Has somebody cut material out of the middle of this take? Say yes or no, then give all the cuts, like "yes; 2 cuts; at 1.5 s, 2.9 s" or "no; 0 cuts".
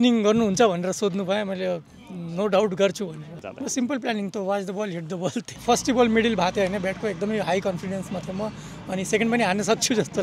yes; 2 cuts; at 3.4 s, 5.5 s